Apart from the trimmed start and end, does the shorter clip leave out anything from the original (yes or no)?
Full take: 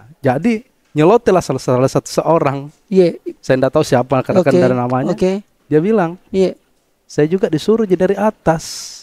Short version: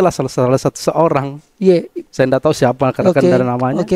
no